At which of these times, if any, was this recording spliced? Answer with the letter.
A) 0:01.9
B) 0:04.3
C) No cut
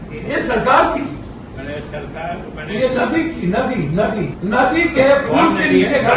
B